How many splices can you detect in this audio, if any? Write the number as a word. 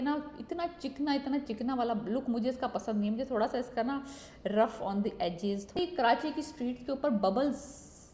one